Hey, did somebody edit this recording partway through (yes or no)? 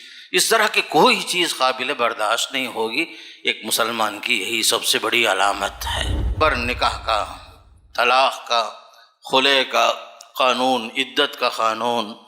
yes